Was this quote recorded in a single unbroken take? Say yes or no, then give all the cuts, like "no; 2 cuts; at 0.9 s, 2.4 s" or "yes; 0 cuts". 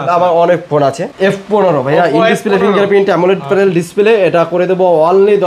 no; 1 cut; at 1.1 s